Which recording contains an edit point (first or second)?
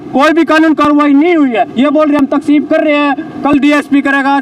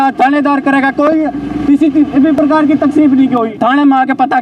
second